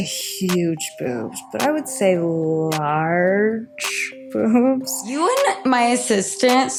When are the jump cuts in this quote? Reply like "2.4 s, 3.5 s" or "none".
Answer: none